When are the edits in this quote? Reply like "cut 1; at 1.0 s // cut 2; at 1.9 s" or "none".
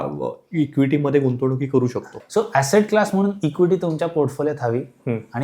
cut 1; at 2.1 s

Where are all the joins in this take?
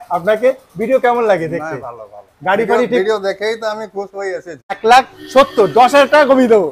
cut 1; at 4.7 s

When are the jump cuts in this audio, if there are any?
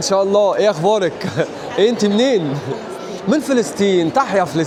none

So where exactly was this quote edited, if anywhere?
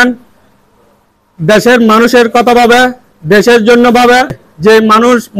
cut 1; at 4.5 s

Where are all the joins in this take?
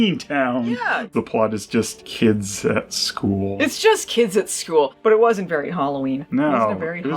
cut 1; at 1.1 s // cut 2; at 4.9 s

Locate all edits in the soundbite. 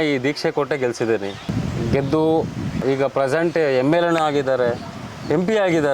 cut 1; at 1.4 s // cut 2; at 2.8 s

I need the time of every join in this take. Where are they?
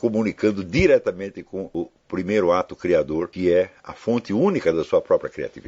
cut 1; at 1.6 s // cut 2; at 3.3 s

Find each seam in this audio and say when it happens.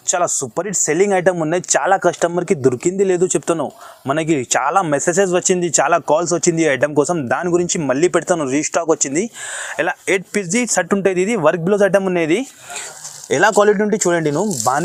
none

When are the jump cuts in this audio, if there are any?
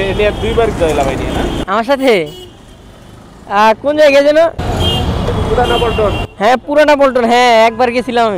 none

